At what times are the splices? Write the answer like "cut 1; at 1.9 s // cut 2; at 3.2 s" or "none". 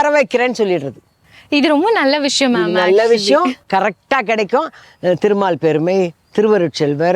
cut 1; at 4.8 s